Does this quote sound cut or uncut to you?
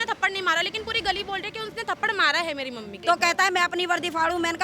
cut